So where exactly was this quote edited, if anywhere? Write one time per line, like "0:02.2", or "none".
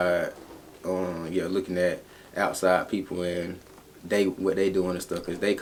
none

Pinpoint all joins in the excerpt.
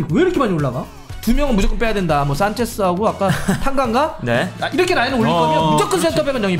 0:01.1
0:04.5

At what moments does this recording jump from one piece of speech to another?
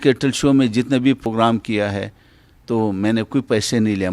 0:01.3

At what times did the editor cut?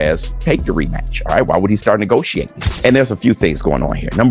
none

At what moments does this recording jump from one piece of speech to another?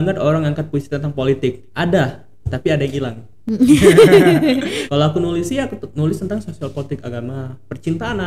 0:04.8

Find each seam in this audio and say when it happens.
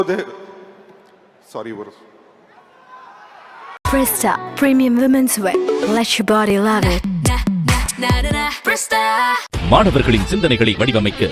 0:03.8

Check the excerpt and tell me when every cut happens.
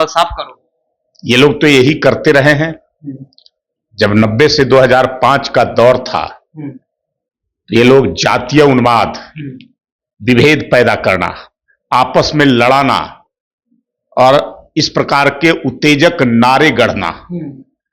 none

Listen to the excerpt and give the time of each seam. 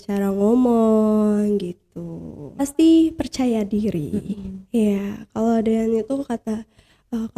0:02.6

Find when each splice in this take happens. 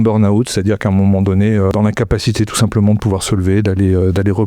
0:01.7

